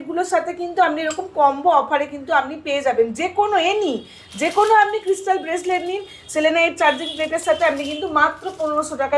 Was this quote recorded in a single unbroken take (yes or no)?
yes